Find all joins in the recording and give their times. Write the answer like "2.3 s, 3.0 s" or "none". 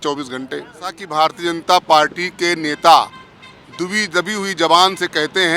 1.0 s